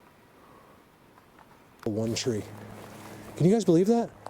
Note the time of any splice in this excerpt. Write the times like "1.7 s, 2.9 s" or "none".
1.9 s

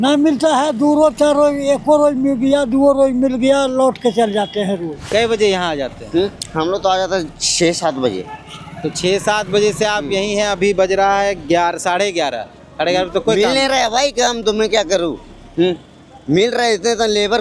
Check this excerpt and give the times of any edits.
5.1 s

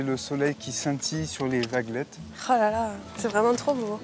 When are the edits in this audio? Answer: 3.0 s

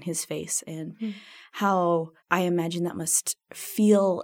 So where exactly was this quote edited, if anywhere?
2.2 s

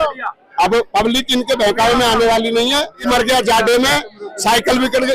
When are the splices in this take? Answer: 3.0 s

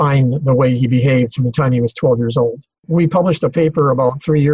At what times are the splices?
2.6 s

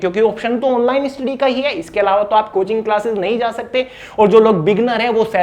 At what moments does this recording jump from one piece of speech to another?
none

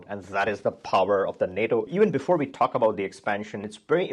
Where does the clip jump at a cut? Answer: 1.9 s

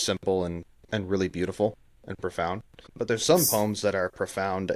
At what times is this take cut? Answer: 2.9 s

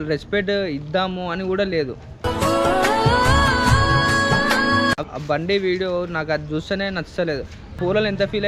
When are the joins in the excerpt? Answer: 5.0 s

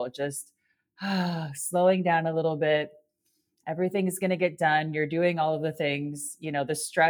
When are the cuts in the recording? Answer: none

